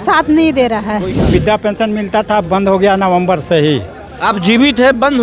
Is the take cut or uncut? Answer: cut